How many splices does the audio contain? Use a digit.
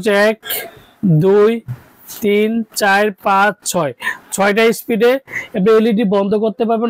0